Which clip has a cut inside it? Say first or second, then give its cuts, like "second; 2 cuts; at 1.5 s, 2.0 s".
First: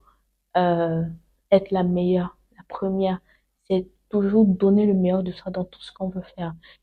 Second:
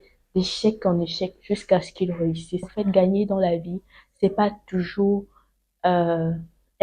second; 1 cut; at 2.7 s